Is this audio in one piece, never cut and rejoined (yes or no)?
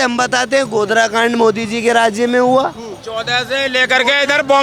yes